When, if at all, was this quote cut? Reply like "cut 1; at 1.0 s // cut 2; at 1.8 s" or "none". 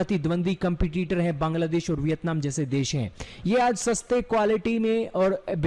none